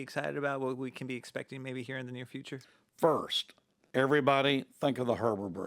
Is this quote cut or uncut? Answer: cut